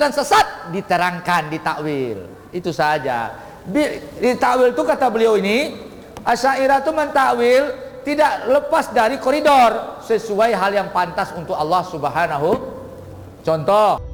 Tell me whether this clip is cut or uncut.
uncut